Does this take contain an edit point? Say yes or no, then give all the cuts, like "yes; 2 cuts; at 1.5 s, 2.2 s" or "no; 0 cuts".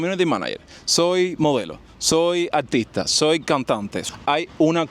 yes; 1 cut; at 4.0 s